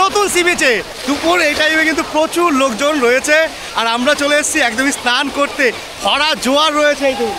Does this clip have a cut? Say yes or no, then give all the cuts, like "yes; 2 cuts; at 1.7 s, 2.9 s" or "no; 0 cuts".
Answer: yes; 1 cut; at 0.9 s